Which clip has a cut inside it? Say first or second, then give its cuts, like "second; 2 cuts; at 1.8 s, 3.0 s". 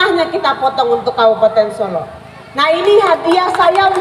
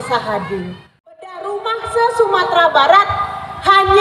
second; 1 cut; at 1.4 s